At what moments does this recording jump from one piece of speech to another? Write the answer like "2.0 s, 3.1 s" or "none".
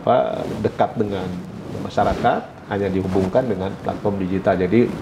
none